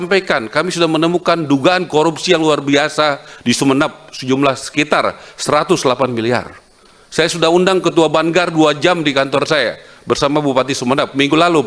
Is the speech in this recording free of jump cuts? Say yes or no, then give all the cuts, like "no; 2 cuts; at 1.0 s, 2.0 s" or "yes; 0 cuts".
yes; 0 cuts